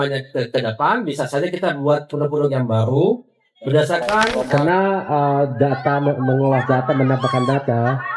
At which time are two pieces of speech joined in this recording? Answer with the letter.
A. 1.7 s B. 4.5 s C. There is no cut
B